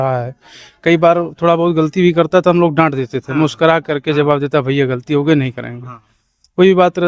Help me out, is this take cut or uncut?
uncut